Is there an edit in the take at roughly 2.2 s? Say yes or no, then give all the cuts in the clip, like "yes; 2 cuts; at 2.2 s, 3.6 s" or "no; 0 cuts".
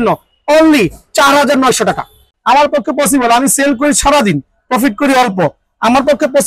no; 0 cuts